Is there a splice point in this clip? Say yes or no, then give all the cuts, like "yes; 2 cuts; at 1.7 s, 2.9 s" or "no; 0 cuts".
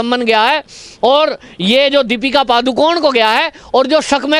no; 0 cuts